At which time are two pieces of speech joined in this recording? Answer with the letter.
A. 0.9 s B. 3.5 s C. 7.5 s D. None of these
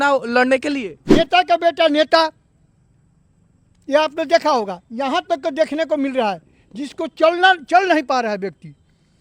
A